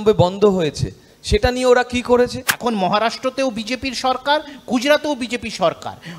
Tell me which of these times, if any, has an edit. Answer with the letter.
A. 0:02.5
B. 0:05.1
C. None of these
A